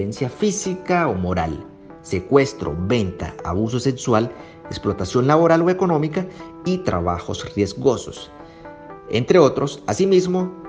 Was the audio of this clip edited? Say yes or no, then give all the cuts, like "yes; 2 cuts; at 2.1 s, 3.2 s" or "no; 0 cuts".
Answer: no; 0 cuts